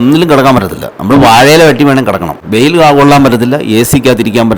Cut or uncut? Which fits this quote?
cut